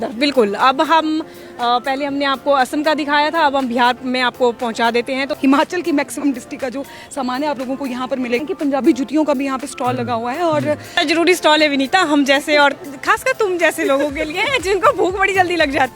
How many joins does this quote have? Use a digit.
3